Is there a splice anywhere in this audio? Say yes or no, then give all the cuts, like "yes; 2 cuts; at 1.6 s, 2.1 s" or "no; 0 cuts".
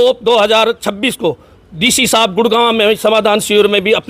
no; 0 cuts